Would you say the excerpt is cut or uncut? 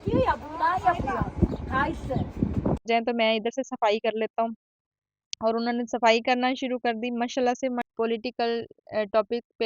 cut